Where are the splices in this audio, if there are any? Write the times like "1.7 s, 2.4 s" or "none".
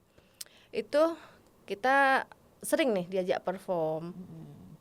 none